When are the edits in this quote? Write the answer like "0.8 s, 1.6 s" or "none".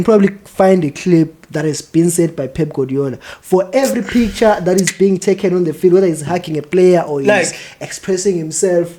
none

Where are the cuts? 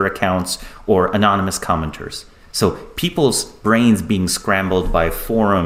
none

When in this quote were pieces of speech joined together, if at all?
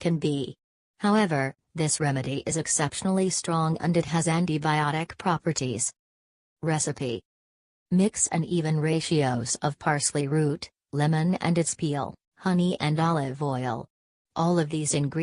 2.9 s

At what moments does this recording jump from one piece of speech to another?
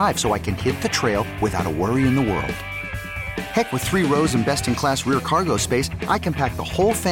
none

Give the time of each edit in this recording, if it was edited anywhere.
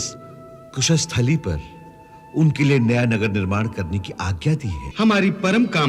4.8 s

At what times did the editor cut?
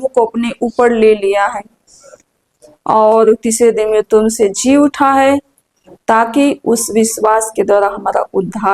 none

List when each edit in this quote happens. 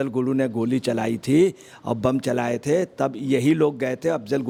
none

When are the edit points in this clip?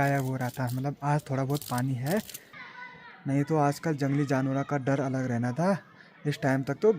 2.6 s

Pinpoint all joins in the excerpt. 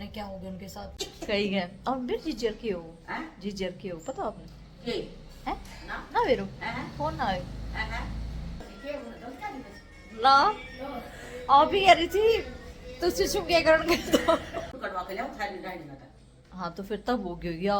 0.9 s, 8.7 s, 14.7 s

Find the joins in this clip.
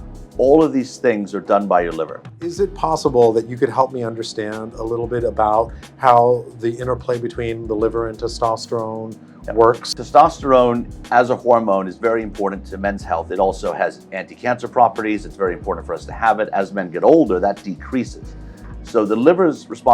2.5 s, 10.0 s

